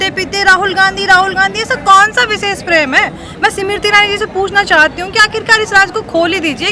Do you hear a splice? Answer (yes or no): no